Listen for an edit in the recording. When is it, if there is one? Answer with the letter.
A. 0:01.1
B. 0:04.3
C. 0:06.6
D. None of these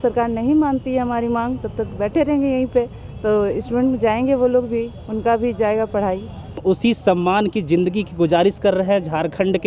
C